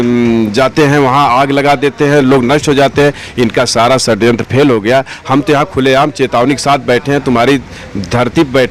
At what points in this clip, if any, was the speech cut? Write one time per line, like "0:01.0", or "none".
0:03.2

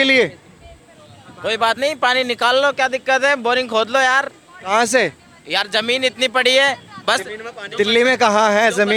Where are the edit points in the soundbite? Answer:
none

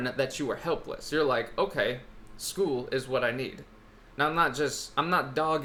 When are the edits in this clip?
none

